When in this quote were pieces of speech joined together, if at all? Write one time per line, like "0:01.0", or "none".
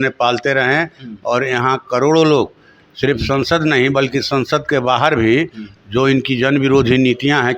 none